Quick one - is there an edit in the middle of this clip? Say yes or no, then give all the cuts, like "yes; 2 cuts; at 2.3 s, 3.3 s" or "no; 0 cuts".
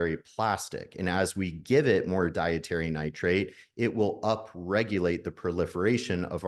no; 0 cuts